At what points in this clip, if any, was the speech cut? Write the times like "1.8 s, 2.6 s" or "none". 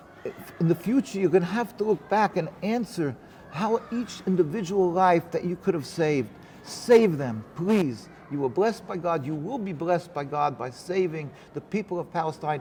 none